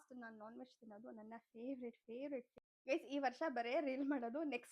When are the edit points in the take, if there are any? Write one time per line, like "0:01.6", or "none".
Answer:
0:02.5